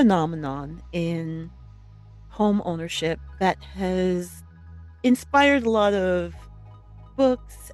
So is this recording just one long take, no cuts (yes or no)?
yes